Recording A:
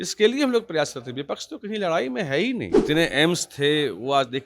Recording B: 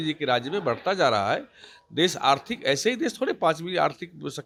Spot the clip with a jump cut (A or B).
A